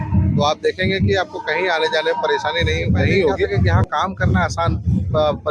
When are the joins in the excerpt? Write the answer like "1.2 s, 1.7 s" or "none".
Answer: 3.7 s